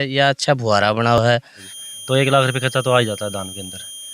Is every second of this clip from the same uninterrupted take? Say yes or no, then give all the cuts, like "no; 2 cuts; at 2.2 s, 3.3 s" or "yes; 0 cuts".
no; 1 cut; at 1.3 s